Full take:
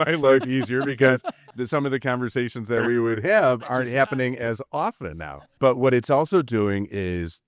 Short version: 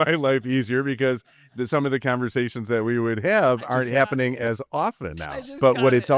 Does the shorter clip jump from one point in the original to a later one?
no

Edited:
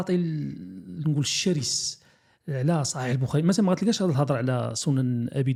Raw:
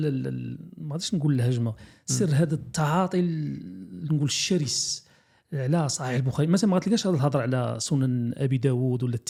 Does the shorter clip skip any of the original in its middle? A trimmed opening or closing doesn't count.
no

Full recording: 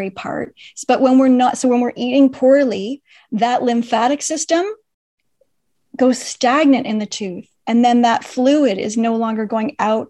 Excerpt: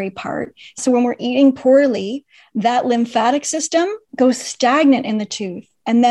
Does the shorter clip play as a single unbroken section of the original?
no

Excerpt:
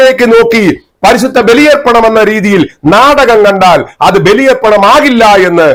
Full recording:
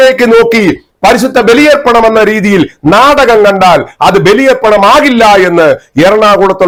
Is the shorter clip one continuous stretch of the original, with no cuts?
yes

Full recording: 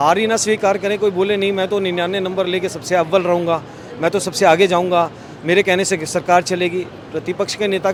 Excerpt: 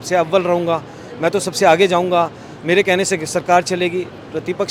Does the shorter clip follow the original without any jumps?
yes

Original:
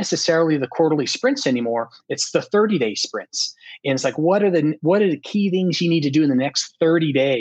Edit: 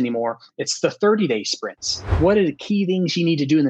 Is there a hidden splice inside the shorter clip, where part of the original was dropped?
yes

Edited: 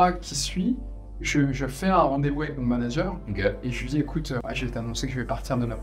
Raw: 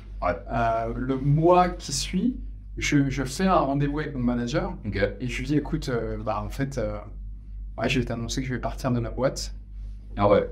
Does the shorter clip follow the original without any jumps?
no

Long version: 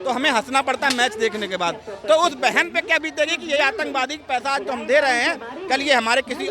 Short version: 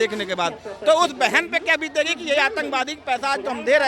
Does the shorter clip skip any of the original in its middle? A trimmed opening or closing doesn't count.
no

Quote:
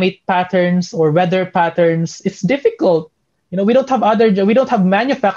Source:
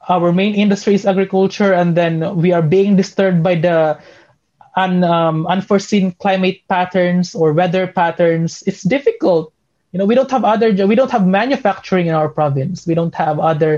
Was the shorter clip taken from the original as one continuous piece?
yes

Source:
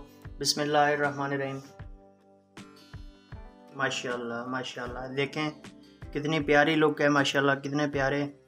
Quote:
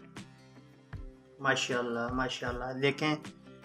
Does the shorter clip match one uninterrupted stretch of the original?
yes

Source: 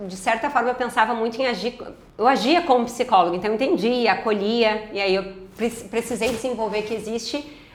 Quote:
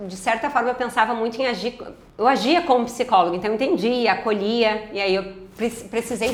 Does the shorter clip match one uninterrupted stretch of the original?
yes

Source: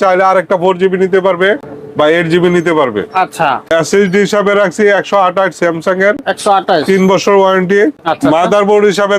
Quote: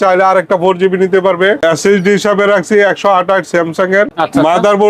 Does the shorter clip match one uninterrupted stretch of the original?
no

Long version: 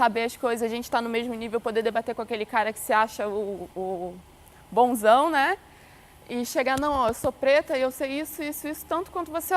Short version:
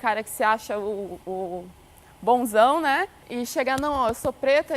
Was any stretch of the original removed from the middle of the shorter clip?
yes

